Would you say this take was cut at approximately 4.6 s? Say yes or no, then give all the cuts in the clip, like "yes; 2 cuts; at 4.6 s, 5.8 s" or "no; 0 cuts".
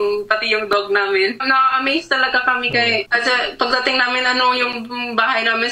no; 2 cuts; at 1.4 s, 3.1 s